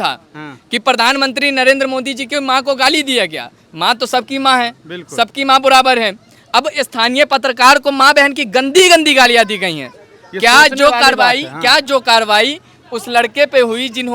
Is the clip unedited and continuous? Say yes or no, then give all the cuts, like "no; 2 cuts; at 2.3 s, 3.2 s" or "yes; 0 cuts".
yes; 0 cuts